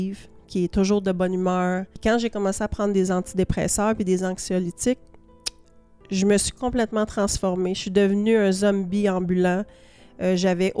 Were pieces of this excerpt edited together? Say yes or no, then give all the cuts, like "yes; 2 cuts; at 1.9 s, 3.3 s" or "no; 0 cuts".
yes; 1 cut; at 1.9 s